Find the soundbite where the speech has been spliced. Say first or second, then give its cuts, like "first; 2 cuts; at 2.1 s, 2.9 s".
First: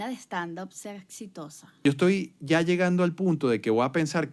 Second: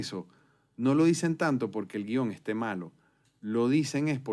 first; 1 cut; at 1.8 s